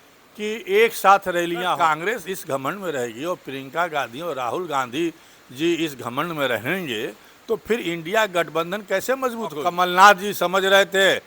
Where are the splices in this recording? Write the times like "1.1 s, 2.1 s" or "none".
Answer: 1.7 s, 9.6 s